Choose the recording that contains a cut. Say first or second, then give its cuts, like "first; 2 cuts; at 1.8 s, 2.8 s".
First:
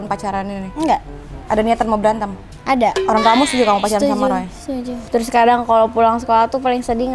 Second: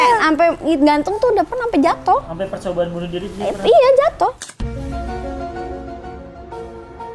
first; 1 cut; at 5.0 s